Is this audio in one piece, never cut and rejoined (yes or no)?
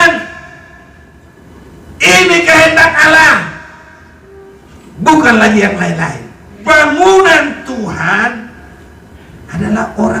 no